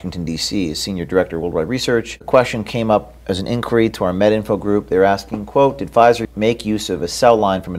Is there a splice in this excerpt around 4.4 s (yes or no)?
no